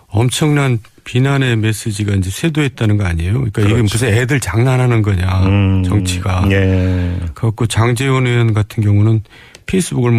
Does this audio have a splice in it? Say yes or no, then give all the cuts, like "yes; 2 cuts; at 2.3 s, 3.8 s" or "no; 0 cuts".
no; 0 cuts